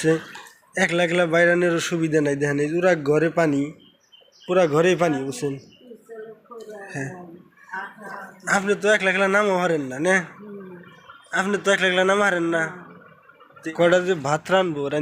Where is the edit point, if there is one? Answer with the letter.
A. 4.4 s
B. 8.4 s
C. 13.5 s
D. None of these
C